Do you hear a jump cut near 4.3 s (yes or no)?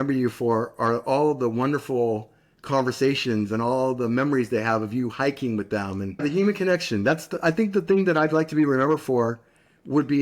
no